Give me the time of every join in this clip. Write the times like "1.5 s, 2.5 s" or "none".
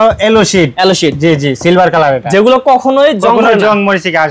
none